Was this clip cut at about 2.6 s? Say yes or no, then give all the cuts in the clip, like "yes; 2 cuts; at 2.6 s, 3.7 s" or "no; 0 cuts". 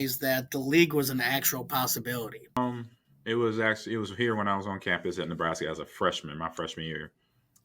yes; 1 cut; at 2.6 s